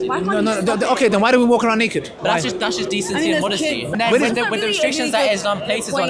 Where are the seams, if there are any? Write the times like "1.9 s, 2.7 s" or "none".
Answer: 2.1 s, 3.9 s